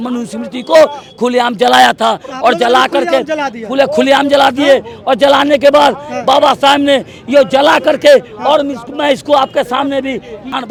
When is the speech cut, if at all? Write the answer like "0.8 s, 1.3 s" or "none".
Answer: none

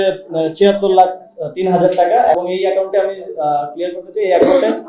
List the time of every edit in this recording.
2.4 s

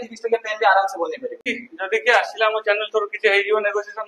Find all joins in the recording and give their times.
1.5 s

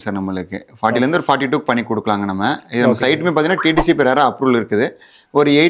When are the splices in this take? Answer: none

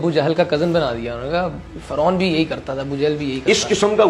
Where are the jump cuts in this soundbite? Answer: none

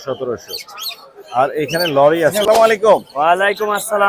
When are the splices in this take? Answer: 2.4 s

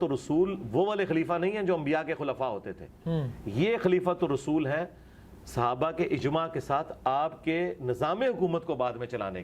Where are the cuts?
none

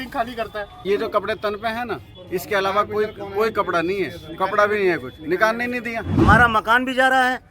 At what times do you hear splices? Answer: 0.8 s, 6.1 s

